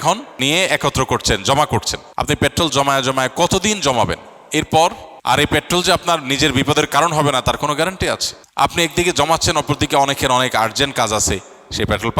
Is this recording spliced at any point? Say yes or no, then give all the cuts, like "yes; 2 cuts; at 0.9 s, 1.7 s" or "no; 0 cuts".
yes; 2 cuts; at 2.0 s, 8.6 s